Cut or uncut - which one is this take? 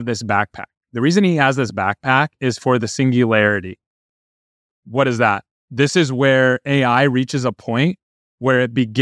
uncut